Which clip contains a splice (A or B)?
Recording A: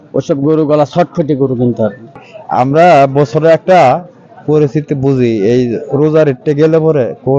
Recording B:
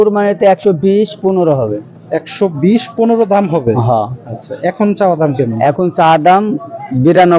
A